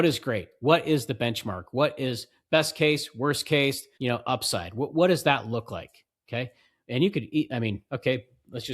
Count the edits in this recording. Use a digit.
1